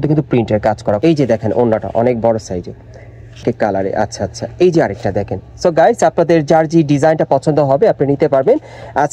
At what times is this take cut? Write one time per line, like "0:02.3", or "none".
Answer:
0:01.0
0:03.4